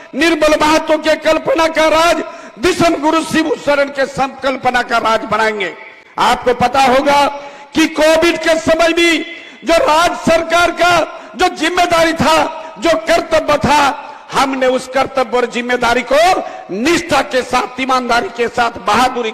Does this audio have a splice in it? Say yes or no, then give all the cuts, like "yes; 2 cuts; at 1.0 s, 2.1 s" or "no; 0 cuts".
no; 0 cuts